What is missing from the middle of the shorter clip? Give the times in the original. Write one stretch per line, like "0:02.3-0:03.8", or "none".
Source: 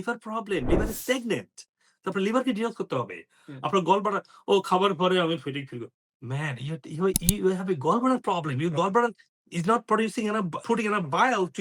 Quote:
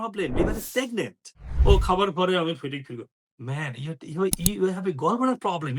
0:01.8-0:04.3

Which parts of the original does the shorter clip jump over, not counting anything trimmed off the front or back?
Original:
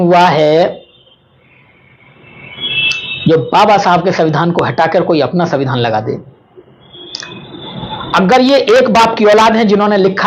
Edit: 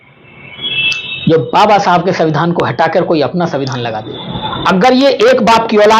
0:06.1-0:07.6

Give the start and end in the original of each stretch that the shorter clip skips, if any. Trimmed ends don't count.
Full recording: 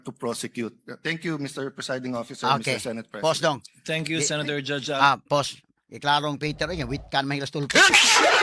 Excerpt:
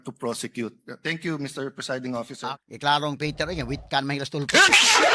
0:02.4-0:05.6

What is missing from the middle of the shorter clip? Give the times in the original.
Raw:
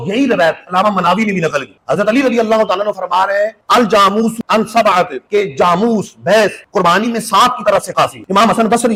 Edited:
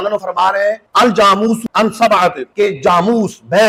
none

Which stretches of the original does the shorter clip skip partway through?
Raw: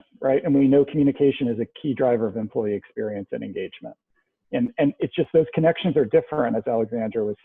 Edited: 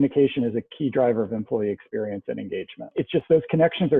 0:04.0-0:05.0

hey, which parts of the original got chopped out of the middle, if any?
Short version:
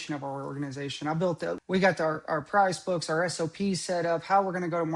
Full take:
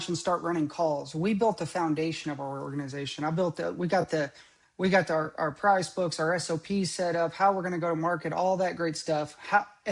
0:03.7-0:04.7

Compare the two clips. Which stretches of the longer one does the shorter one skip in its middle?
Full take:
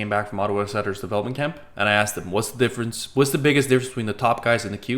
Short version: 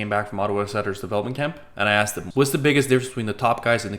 0:02.2-0:03.0

